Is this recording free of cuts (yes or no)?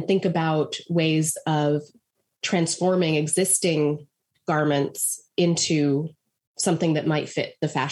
yes